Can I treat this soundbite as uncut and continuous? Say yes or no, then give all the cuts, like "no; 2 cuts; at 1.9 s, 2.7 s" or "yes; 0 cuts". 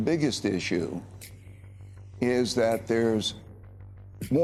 yes; 0 cuts